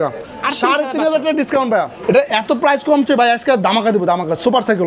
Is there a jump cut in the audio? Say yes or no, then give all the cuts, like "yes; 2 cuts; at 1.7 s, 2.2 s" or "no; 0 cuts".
yes; 1 cut; at 1.9 s